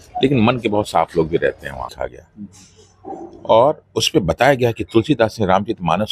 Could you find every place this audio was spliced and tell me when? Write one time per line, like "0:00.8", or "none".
0:01.9